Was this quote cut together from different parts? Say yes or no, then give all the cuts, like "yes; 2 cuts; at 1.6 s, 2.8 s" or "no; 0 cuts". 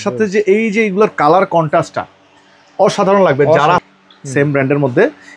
yes; 1 cut; at 3.8 s